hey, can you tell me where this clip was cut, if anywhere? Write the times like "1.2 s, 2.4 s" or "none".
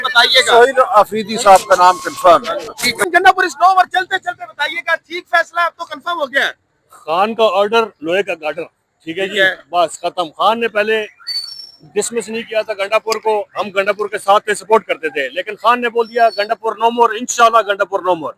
3.1 s

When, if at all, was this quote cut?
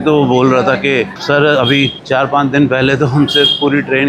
none

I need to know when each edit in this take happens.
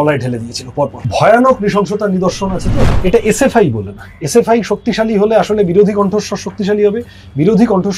1.0 s, 2.8 s

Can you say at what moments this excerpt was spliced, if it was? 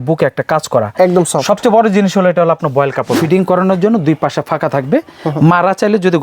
3.2 s

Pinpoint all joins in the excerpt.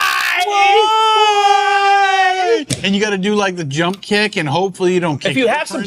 none

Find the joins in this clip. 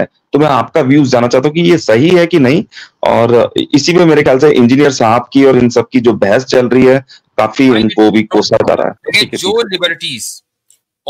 9.0 s

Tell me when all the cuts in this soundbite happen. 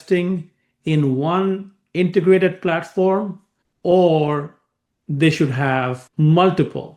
none

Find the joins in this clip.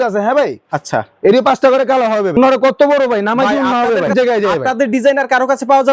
2.4 s, 4.1 s

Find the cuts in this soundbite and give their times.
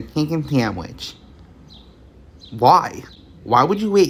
none

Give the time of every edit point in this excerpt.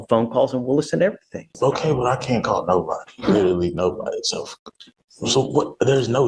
1.5 s

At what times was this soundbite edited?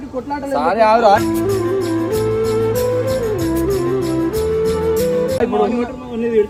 none

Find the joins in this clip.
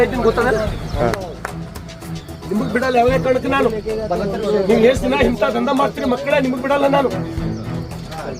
none

